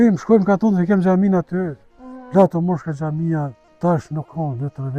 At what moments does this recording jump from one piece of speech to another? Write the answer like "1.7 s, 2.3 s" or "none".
3.6 s